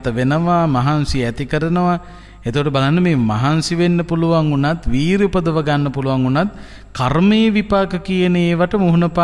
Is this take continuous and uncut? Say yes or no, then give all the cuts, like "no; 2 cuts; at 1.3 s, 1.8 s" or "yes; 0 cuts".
yes; 0 cuts